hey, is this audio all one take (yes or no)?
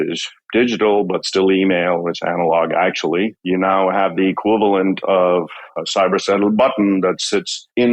no